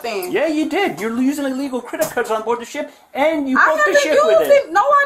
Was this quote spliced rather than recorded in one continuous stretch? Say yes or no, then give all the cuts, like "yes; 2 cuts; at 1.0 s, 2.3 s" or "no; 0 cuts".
no; 0 cuts